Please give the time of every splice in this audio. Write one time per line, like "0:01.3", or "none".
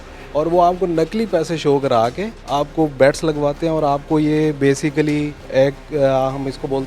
0:05.4